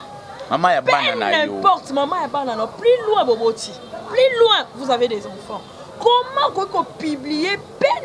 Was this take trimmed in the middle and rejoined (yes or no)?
no